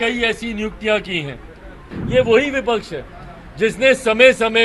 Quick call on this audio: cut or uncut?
cut